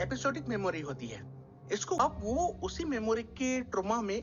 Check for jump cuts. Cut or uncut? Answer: cut